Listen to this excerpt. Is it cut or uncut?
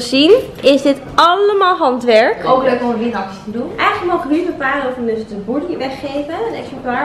cut